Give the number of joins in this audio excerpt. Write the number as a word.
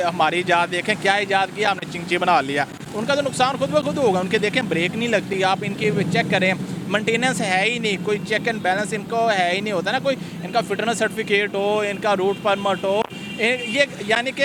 zero